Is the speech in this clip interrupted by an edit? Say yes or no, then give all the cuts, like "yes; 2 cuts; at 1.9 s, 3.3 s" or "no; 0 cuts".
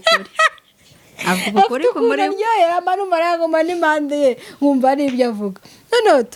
no; 0 cuts